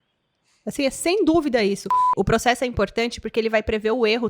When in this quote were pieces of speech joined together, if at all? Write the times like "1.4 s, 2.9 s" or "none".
2.1 s